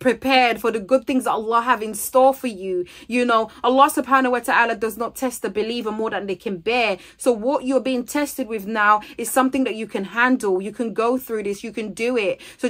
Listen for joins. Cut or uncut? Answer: uncut